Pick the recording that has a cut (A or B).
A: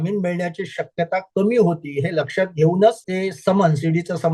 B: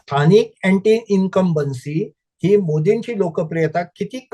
A